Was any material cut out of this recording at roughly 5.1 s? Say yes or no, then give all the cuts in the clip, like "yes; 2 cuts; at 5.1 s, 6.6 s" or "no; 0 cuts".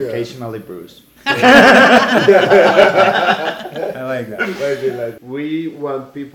yes; 1 cut; at 5.1 s